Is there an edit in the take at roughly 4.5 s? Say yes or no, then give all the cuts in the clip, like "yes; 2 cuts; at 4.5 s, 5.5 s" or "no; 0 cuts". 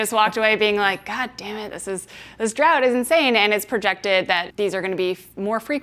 yes; 1 cut; at 4.5 s